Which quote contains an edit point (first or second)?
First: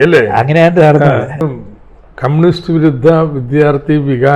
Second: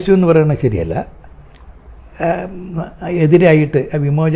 first